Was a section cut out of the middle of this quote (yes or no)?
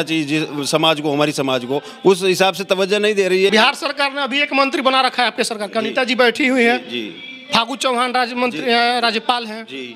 yes